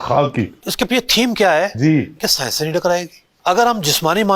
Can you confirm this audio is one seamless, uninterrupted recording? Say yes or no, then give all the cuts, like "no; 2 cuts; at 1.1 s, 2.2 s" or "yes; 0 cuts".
no; 1 cut; at 3.3 s